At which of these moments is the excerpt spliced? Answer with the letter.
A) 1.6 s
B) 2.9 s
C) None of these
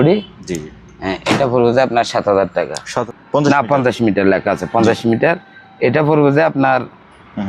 B